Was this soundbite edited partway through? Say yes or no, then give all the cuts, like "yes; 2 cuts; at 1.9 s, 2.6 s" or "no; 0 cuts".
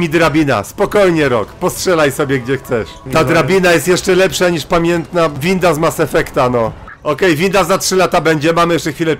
yes; 3 cuts; at 3.0 s, 5.4 s, 6.9 s